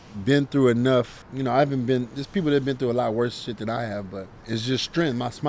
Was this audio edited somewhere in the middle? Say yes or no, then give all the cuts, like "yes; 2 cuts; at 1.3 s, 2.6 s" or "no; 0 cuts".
yes; 2 cuts; at 1.2 s, 4.3 s